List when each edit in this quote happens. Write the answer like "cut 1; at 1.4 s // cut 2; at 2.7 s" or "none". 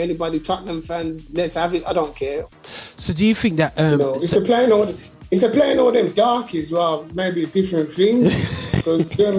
cut 1; at 2.5 s

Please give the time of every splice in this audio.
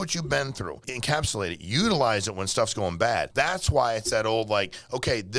cut 1; at 0.9 s // cut 2; at 3.3 s

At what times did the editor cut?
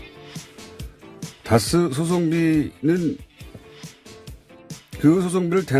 cut 1; at 4.6 s

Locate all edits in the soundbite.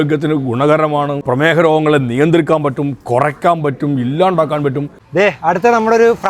cut 1; at 1.2 s // cut 2; at 4.9 s

